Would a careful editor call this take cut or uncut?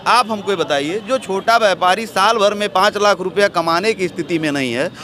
uncut